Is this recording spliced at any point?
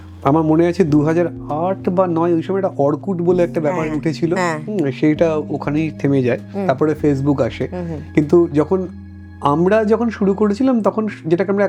no; 0 cuts

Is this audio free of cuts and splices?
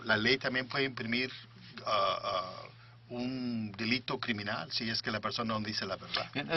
no; 1 cut; at 3.8 s

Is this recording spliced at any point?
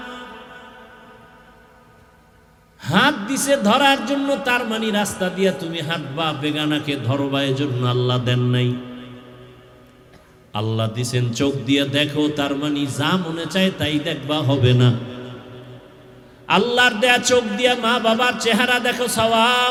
no; 0 cuts

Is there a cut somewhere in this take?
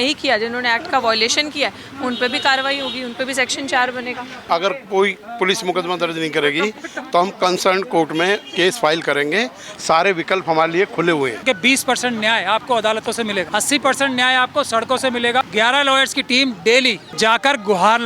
yes; 5 cuts; at 4.4 s, 11.4 s, 13.5 s, 15.5 s, 17.0 s

